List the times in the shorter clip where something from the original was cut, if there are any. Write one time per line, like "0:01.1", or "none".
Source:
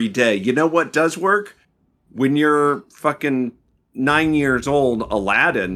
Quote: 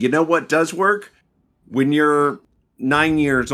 0:02.4